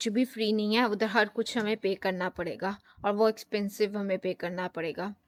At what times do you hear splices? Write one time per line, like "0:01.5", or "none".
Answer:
none